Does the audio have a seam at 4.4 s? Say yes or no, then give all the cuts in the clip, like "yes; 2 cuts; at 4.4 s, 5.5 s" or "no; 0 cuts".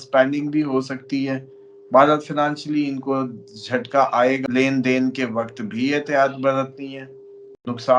yes; 1 cut; at 4.4 s